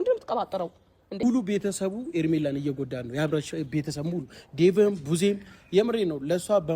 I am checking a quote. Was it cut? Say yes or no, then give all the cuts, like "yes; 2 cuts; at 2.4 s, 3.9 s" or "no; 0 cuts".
yes; 1 cut; at 1.2 s